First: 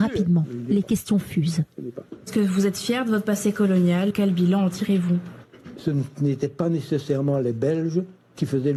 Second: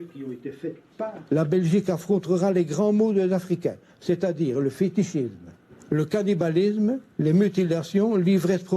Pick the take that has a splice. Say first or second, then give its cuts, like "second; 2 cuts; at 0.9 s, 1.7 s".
second; 1 cut; at 7.1 s